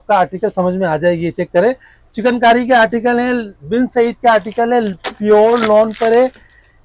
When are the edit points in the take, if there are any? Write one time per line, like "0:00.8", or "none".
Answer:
none